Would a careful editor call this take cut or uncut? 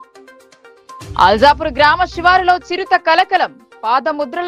cut